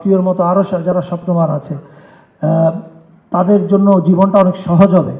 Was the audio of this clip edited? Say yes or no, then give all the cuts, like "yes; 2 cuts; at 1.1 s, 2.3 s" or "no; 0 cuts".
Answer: no; 0 cuts